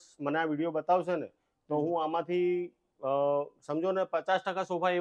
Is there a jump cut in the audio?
no; 0 cuts

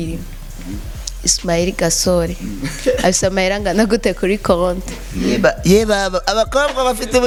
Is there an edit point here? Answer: no; 0 cuts

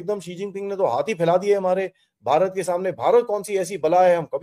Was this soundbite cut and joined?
no; 0 cuts

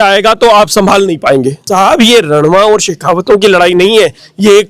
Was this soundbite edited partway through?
yes; 1 cut; at 1.6 s

